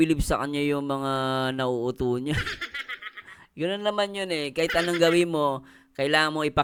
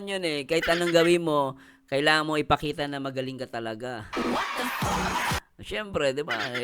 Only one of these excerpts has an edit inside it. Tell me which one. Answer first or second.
second